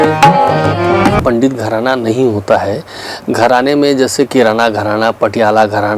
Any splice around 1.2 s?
yes; 1 cut; at 1.2 s

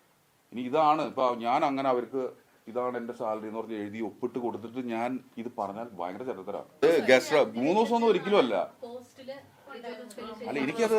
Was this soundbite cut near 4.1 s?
no; 1 cut; at 6.8 s

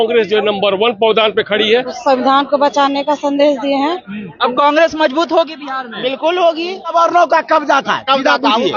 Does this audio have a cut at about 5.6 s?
no; 3 cuts; at 1.9 s, 4.3 s, 6.9 s

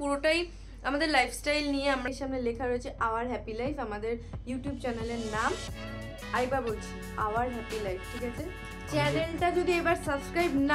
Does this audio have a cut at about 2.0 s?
yes; 1 cut; at 2.0 s

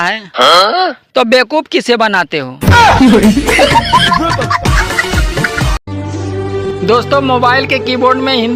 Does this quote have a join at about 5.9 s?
yes; 1 cut; at 5.9 s

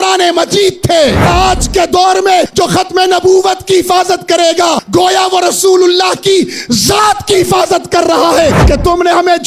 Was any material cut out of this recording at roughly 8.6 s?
yes; 4 cuts; at 1.3 s, 2.5 s, 4.8 s, 8.6 s

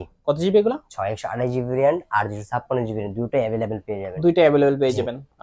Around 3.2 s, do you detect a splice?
no; 0 cuts

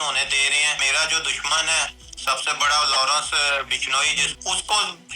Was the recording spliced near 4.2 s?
yes; 2 cuts; at 0.9 s, 4.2 s

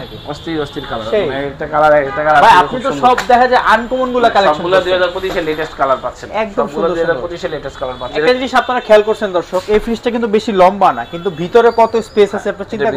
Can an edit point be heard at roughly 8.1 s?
yes; 1 cut; at 8.1 s

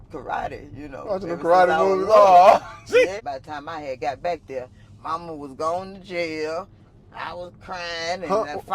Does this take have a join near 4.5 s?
no; 1 cut; at 3.1 s

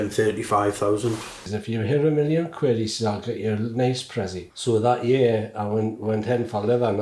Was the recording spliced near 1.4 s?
yes; 2 cuts; at 1.4 s, 4.5 s

